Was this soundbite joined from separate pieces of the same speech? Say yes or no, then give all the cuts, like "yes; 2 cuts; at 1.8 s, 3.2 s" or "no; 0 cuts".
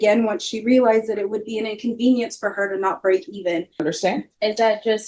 yes; 1 cut; at 3.8 s